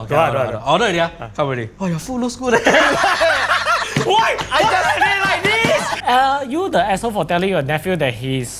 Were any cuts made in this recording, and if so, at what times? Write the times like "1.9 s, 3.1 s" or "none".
1.7 s, 5.9 s